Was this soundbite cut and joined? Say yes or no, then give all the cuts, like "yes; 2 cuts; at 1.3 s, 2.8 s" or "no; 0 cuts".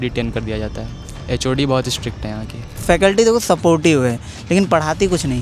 yes; 1 cut; at 2.7 s